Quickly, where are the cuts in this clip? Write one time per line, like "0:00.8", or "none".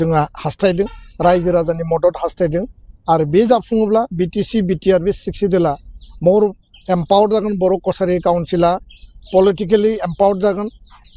none